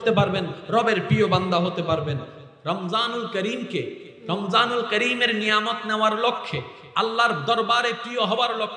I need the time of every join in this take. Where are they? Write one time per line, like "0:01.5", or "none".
0:02.3

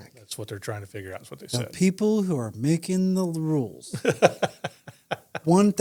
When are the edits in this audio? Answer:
none

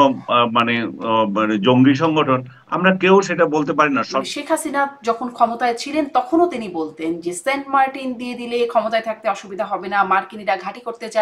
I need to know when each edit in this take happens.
0:04.2

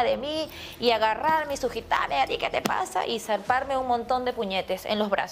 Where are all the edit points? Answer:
none

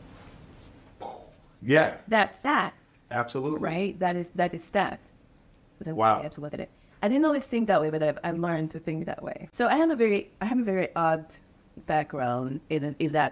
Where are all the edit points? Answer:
0:09.4

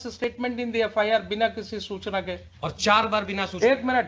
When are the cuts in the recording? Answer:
none

